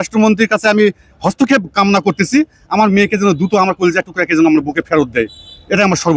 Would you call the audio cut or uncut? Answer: uncut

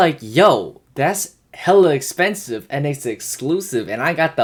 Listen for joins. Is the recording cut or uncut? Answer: uncut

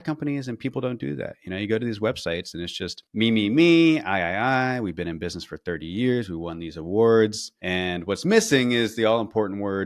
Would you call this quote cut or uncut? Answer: uncut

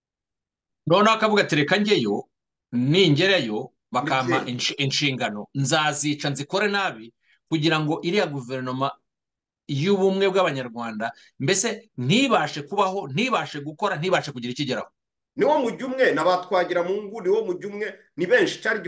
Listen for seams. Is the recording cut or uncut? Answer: uncut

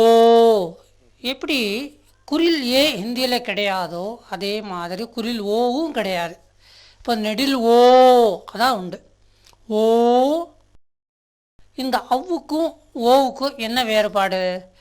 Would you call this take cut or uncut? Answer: cut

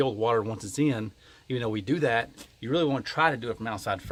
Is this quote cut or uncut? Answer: uncut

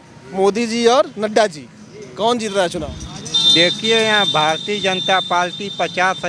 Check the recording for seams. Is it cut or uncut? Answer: uncut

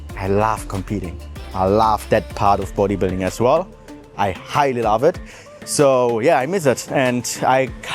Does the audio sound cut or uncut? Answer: uncut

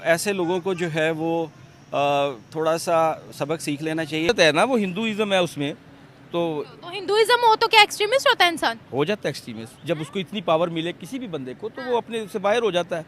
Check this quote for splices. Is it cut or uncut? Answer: cut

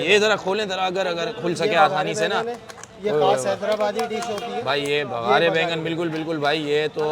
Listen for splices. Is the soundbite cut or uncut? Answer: uncut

